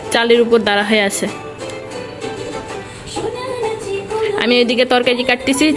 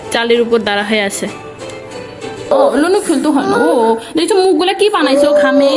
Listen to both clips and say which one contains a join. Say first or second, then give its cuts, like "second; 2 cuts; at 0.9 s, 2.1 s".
second; 1 cut; at 2.5 s